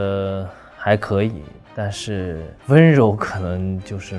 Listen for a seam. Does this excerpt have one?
yes; 1 cut; at 2.5 s

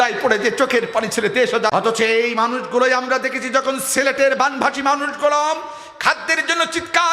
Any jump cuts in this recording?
yes; 1 cut; at 1.7 s

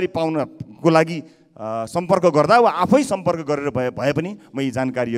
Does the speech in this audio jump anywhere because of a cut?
no; 0 cuts

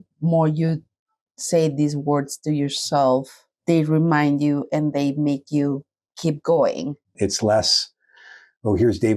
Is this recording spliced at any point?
yes; 1 cut; at 7.1 s

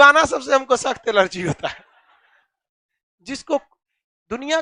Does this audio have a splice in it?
no; 0 cuts

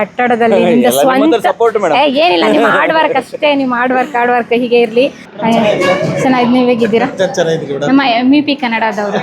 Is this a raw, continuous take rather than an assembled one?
no; 1 cut; at 5.2 s

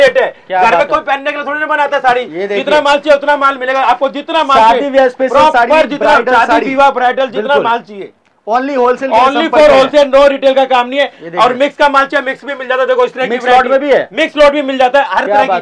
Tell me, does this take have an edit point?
no; 0 cuts

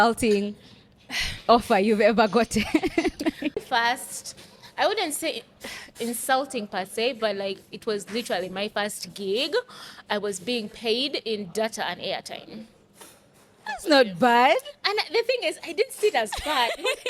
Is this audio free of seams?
no; 1 cut; at 3.6 s

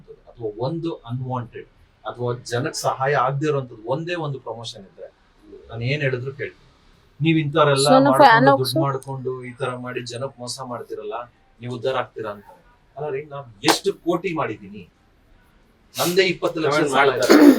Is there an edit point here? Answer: no; 0 cuts

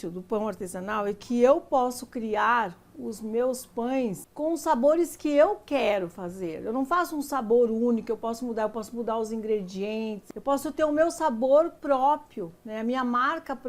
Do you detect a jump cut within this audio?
yes; 2 cuts; at 4.2 s, 10.2 s

